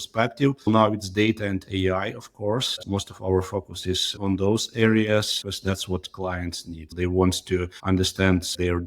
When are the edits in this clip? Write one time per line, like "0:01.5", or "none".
0:00.7
0:02.9
0:06.9